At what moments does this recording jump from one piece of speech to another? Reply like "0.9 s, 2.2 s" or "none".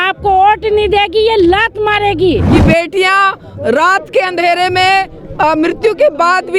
2.5 s